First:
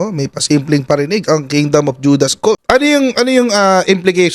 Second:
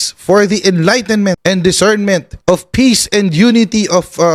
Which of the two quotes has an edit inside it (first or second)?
first